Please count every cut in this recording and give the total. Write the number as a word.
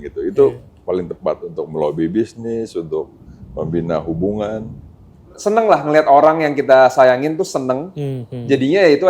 one